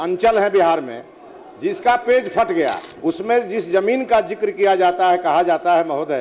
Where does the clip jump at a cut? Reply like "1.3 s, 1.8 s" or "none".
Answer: 2.9 s